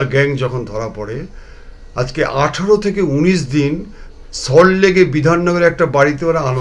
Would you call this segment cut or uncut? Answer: uncut